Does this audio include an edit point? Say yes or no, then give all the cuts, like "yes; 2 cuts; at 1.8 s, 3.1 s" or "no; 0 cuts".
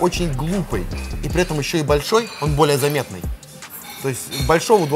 no; 0 cuts